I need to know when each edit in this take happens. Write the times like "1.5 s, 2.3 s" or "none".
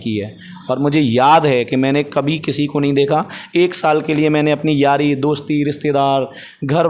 none